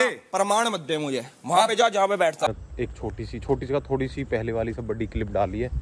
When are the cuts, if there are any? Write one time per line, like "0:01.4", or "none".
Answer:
0:02.5

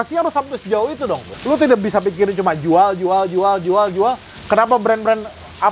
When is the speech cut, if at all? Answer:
0:01.3
0:04.3

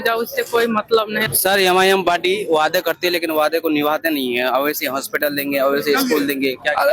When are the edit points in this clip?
0:01.3

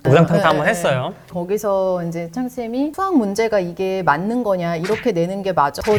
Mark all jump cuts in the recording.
none

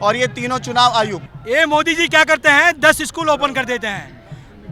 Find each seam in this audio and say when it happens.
0:01.3

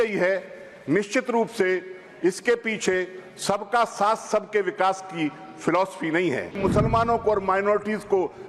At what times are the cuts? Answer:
0:06.6

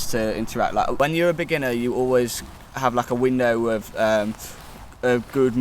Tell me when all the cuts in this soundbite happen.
0:00.9

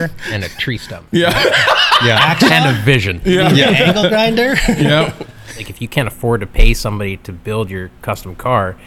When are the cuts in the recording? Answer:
0:02.5
0:05.6

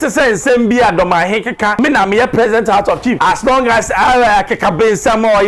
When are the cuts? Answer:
0:01.7
0:03.2

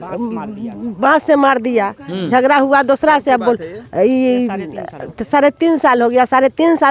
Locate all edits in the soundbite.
none

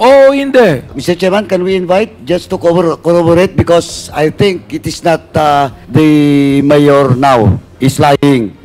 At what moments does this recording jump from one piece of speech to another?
0:00.9
0:05.8
0:07.6

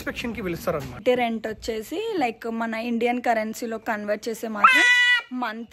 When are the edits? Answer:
0:01.0

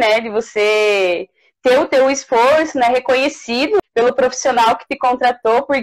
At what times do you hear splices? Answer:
0:03.8

